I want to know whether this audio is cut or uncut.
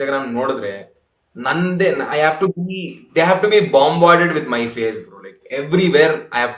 uncut